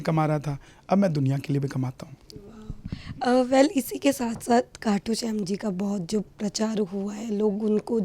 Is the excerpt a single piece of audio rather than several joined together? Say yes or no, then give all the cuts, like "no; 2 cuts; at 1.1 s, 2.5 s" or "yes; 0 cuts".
yes; 0 cuts